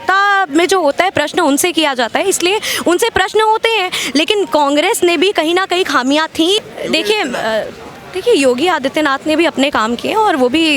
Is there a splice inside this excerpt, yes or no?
yes